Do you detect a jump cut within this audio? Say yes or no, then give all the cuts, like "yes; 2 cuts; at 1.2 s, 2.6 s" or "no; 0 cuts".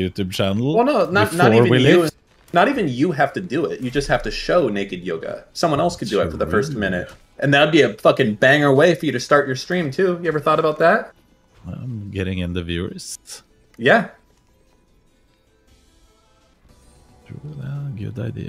no; 0 cuts